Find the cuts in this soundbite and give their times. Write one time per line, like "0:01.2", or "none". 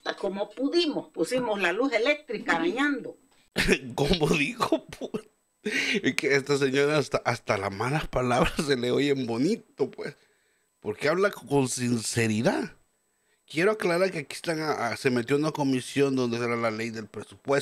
none